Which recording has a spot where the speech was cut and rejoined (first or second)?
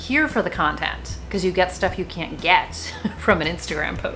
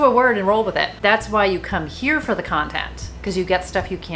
second